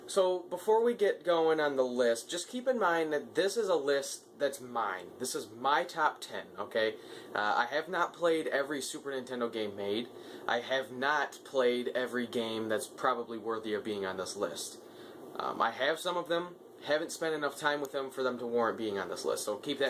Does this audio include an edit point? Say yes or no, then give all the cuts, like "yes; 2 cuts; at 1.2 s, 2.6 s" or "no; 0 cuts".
no; 0 cuts